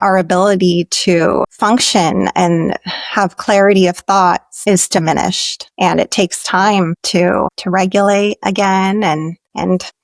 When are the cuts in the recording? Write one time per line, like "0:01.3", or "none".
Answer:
0:01.5